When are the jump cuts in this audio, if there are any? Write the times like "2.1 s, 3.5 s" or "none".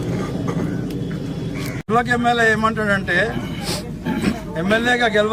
1.8 s